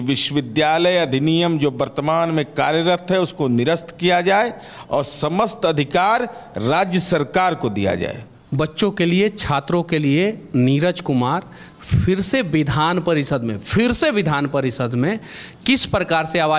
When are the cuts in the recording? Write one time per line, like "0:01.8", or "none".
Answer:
0:08.4